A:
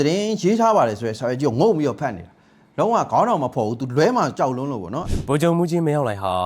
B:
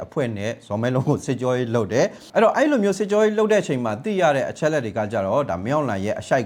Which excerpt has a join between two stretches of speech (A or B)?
A